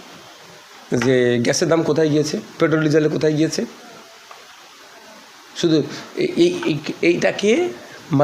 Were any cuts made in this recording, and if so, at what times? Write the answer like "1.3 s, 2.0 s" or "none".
none